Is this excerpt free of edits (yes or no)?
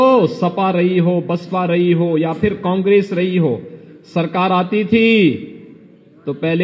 yes